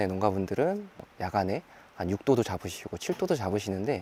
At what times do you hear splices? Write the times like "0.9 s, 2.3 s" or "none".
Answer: none

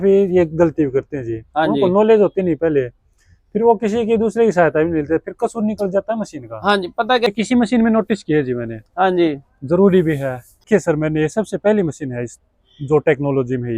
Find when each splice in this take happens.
7.3 s, 10.5 s

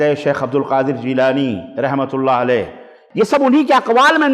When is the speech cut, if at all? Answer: 2.9 s

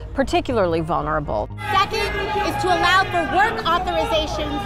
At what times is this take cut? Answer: 1.5 s

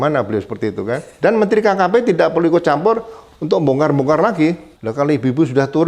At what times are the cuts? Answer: 1.1 s, 4.7 s

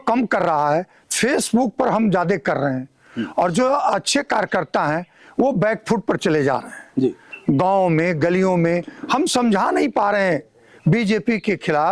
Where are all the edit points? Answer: none

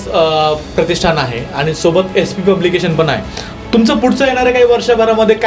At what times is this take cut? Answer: none

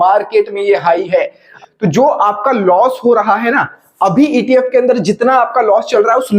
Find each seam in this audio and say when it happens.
1.5 s

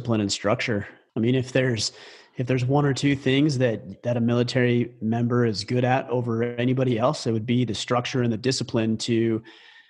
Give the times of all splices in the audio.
1.0 s

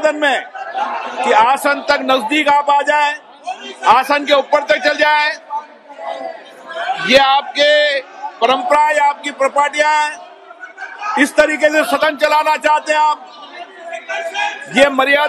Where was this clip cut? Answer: none

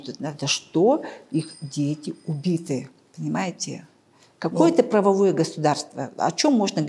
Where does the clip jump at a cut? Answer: none

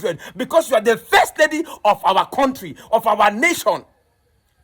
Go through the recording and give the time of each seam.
none

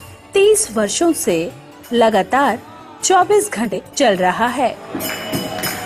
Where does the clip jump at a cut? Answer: 3.7 s

